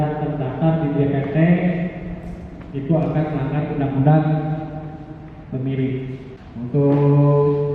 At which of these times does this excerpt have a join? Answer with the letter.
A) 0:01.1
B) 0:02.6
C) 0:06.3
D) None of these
C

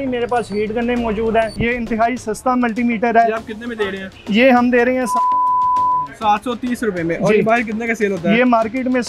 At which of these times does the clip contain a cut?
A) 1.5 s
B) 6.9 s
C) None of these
A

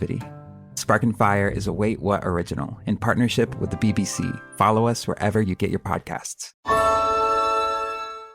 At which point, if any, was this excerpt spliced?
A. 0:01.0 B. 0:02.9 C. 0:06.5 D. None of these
C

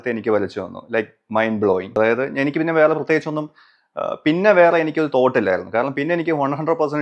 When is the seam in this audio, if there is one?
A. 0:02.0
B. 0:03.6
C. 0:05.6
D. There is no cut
A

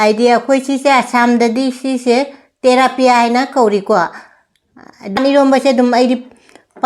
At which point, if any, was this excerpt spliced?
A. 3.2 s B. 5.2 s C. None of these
B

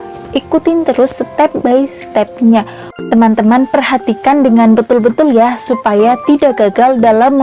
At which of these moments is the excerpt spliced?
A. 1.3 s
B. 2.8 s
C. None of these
B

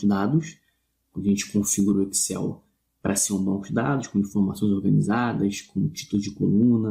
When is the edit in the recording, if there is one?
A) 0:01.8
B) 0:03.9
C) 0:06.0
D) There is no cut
C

